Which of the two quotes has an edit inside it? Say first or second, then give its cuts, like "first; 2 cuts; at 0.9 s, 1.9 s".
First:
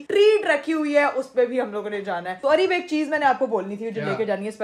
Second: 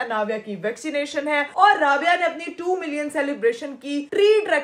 first; 1 cut; at 2.4 s